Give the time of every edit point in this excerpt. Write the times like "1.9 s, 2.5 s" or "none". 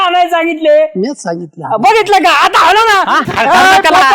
3.2 s